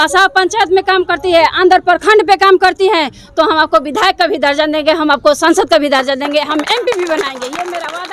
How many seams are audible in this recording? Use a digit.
0